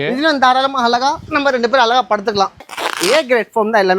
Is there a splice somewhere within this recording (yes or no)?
yes